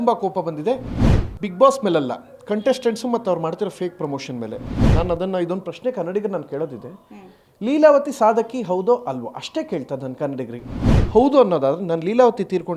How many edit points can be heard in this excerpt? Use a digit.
1